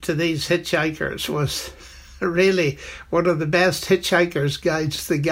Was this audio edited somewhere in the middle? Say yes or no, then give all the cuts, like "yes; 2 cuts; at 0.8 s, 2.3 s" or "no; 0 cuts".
no; 0 cuts